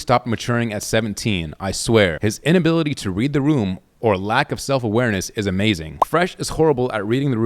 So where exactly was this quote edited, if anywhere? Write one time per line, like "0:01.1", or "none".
0:02.2
0:05.9